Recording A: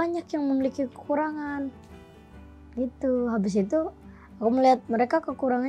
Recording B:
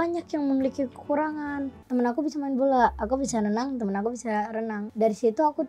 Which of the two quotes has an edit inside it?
B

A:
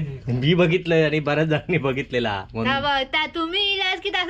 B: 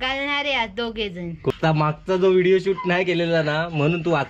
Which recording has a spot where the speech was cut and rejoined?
B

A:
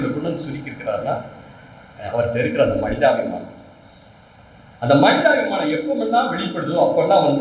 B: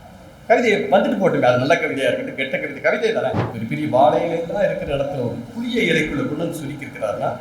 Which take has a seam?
B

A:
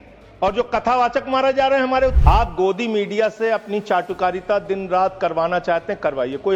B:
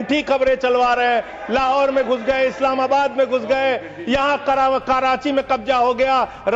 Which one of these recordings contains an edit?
A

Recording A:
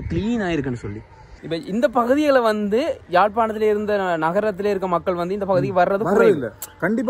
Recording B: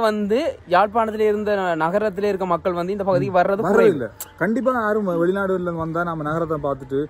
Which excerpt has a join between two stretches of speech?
A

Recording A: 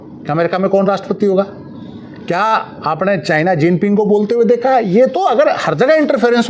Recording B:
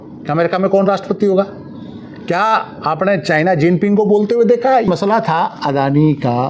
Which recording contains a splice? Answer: B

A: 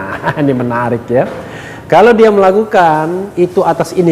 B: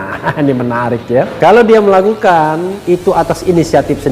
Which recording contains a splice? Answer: B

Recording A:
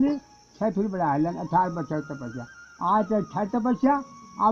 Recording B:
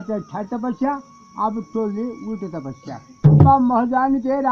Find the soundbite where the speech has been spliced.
B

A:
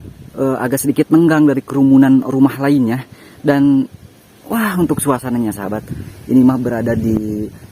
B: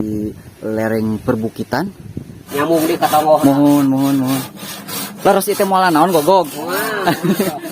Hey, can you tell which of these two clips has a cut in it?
B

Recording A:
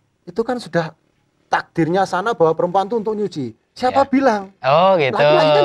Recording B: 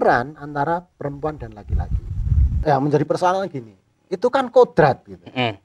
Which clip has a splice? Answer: B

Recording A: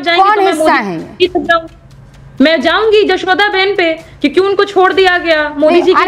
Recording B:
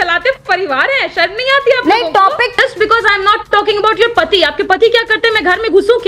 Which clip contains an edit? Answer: B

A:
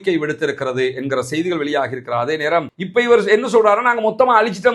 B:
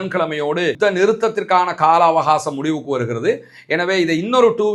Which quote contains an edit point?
A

